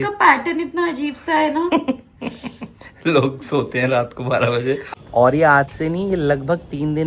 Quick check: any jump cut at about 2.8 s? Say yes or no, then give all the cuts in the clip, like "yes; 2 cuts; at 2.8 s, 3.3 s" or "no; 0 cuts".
no; 1 cut; at 4.9 s